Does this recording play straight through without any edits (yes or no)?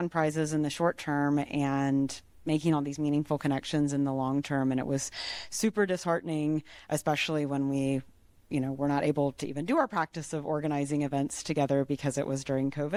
yes